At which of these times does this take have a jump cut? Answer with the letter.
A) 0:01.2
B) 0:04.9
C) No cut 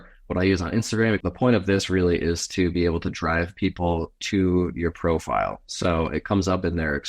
A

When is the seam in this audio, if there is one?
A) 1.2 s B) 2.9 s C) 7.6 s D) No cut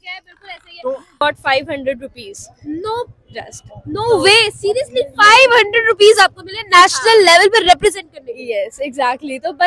A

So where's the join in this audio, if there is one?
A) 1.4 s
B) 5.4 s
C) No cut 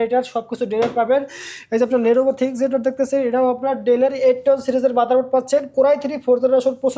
C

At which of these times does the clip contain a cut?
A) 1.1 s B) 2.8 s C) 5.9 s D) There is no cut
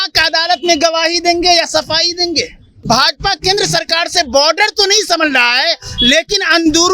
B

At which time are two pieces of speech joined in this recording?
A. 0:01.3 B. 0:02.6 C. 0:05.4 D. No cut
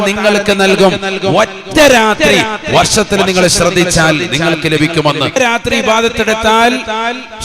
C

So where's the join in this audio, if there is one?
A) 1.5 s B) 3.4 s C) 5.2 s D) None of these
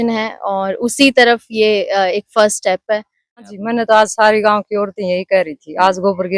B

